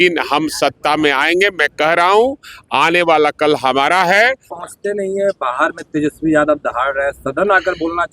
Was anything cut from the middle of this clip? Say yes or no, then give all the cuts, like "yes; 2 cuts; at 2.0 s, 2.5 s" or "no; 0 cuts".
yes; 1 cut; at 4.6 s